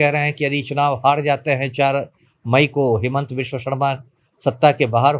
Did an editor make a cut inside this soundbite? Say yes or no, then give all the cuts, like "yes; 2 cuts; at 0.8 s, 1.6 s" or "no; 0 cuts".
no; 0 cuts